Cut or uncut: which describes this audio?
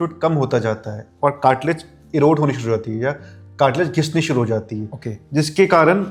uncut